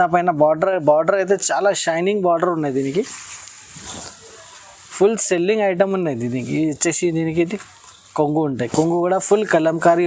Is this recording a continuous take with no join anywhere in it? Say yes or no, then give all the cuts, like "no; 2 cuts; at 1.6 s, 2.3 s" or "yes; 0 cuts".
yes; 0 cuts